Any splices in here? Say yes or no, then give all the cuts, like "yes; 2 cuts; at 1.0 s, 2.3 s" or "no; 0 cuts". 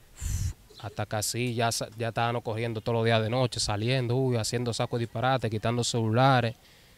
no; 0 cuts